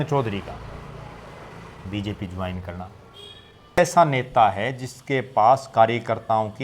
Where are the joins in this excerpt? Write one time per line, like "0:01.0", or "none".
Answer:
0:03.8